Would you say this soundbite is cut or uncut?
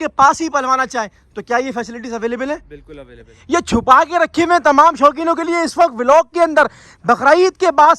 cut